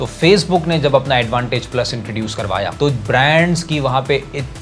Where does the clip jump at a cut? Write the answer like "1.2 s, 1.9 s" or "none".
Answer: 2.8 s